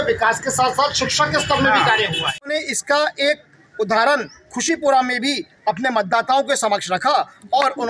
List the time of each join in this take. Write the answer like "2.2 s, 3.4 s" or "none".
2.5 s